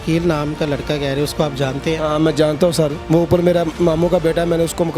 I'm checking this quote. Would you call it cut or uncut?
uncut